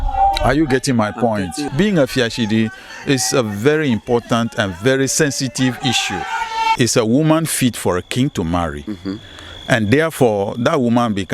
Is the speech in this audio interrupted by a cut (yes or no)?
yes